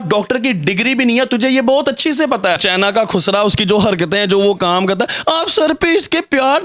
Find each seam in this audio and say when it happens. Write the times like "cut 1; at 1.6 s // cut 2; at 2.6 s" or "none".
cut 1; at 2.6 s